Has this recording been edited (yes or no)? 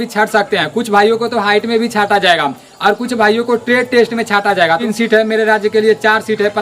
yes